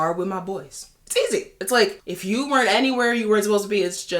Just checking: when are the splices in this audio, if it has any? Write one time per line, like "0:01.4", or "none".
0:02.1